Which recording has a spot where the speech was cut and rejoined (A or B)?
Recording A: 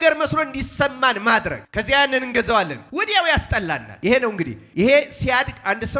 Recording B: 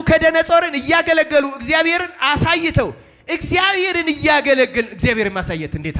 A